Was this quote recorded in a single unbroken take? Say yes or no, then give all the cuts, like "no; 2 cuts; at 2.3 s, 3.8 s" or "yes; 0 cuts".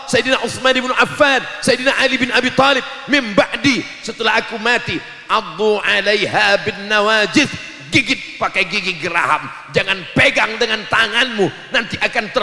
yes; 0 cuts